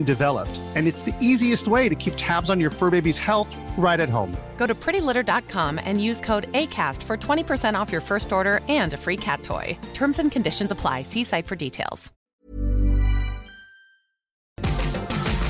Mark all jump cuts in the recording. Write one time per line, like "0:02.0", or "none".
0:12.2
0:14.6